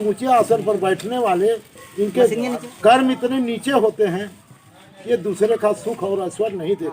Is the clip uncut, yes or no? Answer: no